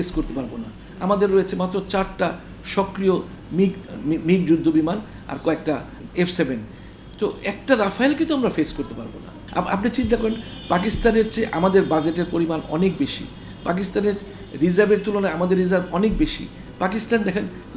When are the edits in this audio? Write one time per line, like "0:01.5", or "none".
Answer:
0:03.8
0:06.0
0:09.4